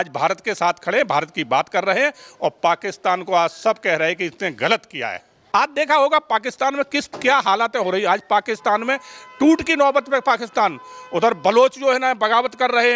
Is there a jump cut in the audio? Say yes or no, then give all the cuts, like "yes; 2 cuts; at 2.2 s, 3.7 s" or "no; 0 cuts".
yes; 1 cut; at 5.3 s